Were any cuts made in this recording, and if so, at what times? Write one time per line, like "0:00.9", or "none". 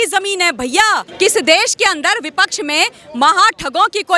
0:01.1